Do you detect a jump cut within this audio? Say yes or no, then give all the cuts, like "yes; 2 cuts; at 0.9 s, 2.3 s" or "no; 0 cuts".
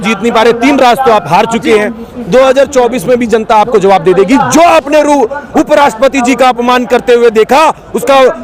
no; 0 cuts